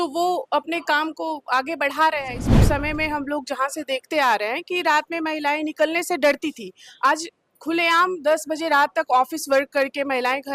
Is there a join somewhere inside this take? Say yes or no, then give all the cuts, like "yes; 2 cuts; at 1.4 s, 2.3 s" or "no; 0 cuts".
yes; 1 cut; at 2.5 s